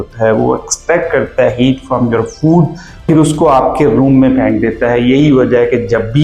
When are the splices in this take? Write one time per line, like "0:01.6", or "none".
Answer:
0:03.1